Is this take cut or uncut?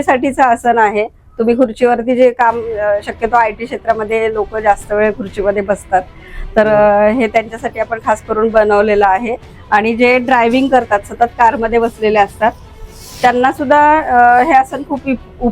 uncut